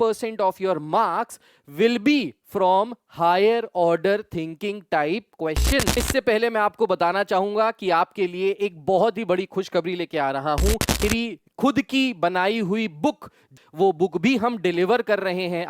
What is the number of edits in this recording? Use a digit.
3